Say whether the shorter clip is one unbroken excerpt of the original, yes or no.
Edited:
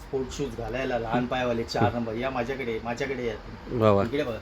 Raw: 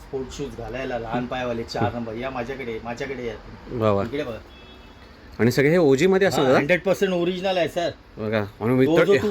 yes